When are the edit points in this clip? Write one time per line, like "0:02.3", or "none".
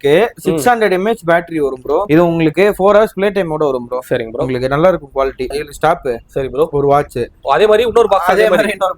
0:02.1
0:05.6

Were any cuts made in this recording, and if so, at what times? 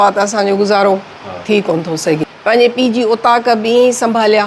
0:02.3

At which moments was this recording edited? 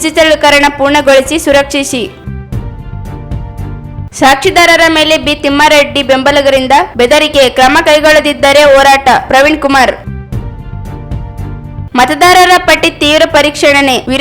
none

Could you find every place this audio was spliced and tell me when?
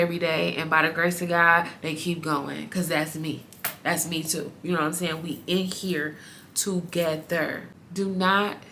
0:07.6

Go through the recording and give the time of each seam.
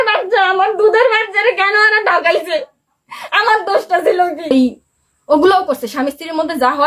0:04.5

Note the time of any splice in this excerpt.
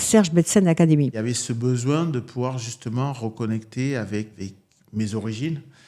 0:01.1
0:04.3

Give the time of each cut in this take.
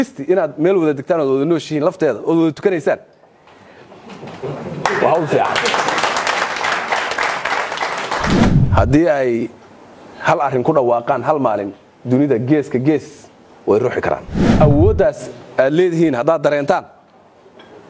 0:08.5
0:14.4

